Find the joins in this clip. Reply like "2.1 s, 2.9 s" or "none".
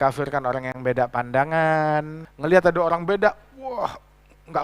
2.2 s